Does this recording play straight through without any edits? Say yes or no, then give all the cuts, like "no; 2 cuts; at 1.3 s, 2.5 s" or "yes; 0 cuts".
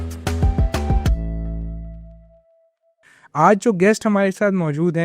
no; 1 cut; at 3.0 s